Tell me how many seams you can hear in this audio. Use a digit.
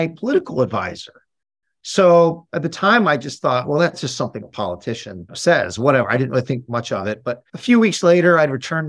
3